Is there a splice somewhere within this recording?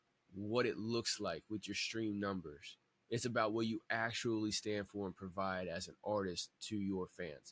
no; 0 cuts

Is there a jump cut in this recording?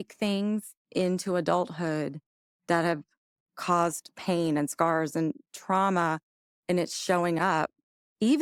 no; 0 cuts

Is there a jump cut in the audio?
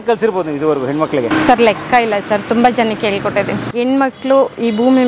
yes; 2 cuts; at 1.3 s, 3.7 s

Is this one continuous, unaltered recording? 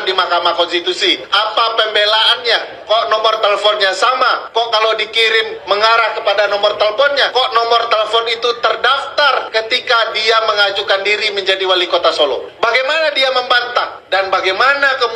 no; 8 cuts; at 1.3 s, 2.7 s, 4.4 s, 5.5 s, 7.3 s, 9.5 s, 12.5 s, 14.0 s

